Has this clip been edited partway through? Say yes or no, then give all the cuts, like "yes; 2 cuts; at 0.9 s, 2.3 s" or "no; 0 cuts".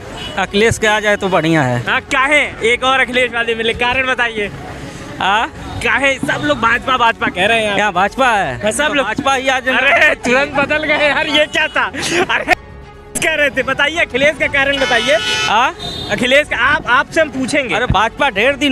no; 0 cuts